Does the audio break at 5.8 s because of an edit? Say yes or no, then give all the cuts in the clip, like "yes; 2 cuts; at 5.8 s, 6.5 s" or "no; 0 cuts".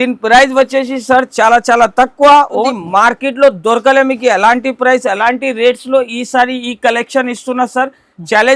no; 1 cut; at 2.7 s